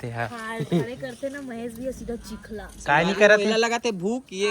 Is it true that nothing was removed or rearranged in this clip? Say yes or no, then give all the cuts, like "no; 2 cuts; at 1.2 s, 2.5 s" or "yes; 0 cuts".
no; 1 cut; at 2.7 s